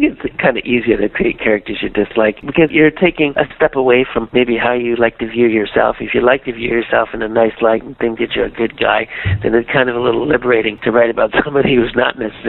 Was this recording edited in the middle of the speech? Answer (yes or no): no